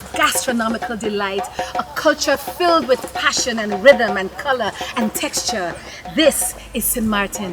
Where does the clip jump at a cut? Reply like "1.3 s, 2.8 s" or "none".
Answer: none